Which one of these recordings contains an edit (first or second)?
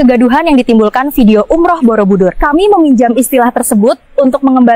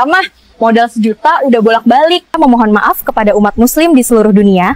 second